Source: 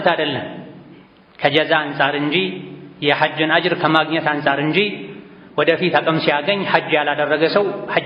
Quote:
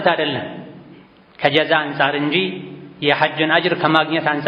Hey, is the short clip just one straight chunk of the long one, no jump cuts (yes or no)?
yes